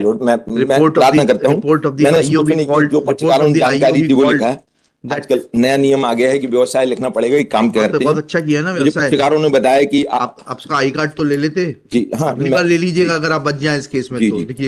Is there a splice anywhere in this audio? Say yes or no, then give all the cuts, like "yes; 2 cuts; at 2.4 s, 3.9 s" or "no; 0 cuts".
no; 0 cuts